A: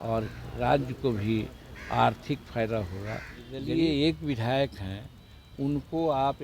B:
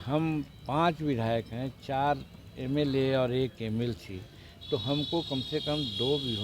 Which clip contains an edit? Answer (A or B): A